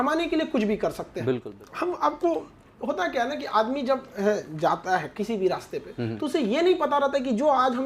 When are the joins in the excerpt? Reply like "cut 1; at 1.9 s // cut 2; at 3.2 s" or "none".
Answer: cut 1; at 1.6 s